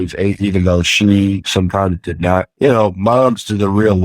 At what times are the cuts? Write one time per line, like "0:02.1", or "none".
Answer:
0:02.5